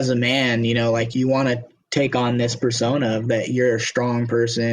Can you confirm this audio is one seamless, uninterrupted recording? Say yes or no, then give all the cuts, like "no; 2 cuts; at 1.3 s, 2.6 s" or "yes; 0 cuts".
no; 1 cut; at 1.1 s